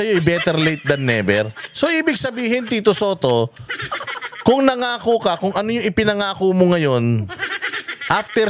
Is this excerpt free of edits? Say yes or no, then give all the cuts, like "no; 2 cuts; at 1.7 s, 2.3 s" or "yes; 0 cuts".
yes; 0 cuts